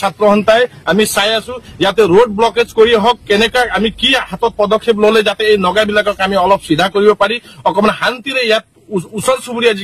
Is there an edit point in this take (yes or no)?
no